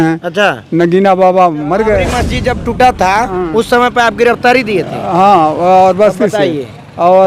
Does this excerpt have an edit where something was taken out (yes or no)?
yes